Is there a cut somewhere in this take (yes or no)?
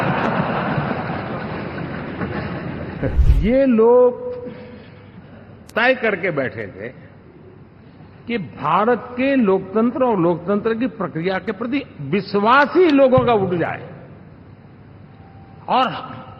yes